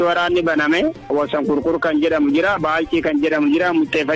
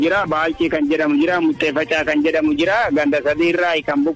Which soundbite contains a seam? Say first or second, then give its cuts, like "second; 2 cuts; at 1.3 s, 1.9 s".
first; 1 cut; at 1.1 s